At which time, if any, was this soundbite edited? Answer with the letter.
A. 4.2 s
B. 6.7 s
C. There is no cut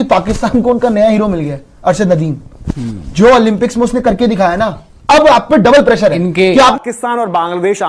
B